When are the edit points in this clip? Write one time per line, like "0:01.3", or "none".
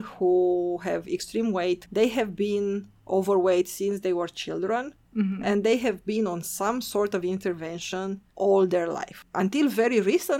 none